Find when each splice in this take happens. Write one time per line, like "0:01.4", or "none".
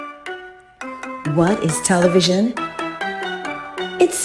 0:01.2